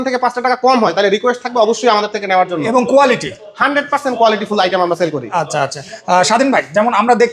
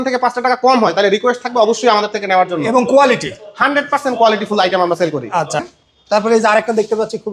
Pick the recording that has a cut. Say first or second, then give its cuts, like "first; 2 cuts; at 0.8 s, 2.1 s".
second; 1 cut; at 5.6 s